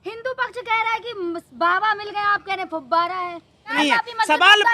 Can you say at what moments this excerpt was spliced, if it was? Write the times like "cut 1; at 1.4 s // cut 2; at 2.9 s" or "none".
cut 1; at 3.7 s

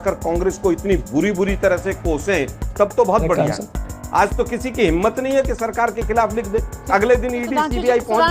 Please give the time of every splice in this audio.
cut 1; at 3.8 s

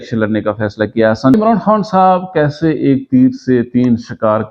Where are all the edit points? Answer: cut 1; at 1.3 s

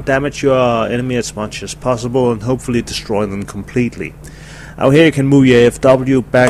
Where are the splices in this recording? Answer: none

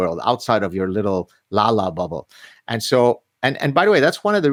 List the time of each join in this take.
none

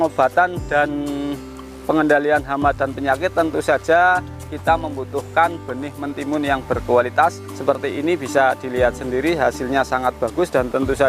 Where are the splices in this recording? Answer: cut 1; at 7.5 s

